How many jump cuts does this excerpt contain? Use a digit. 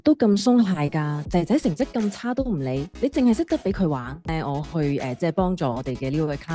1